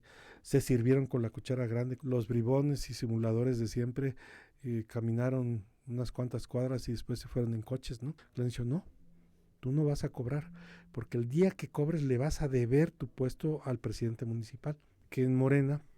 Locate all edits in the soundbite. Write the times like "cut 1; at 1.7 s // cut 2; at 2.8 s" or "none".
cut 1; at 2.0 s // cut 2; at 8.2 s // cut 3; at 15.0 s